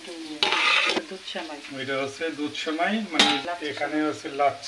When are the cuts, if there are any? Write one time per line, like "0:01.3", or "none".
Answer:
0:01.0
0:03.4